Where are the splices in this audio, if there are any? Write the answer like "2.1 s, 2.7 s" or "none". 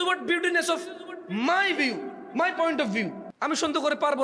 3.2 s

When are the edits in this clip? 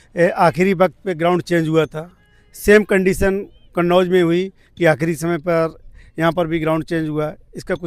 none

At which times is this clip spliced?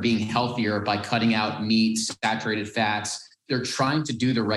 3.4 s

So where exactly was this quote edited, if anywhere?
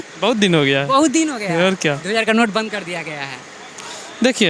none

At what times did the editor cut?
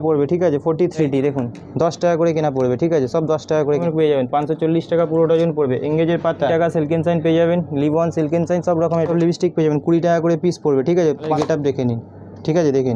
1.1 s, 3.8 s, 6.5 s, 9.1 s, 11.3 s

